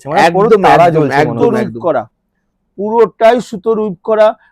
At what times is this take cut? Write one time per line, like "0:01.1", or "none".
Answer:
0:01.4